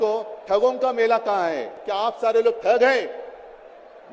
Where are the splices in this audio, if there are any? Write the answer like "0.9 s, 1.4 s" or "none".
none